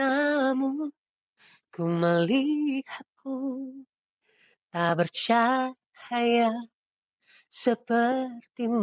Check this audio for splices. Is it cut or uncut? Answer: uncut